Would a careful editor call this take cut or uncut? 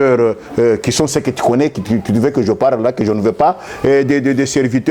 uncut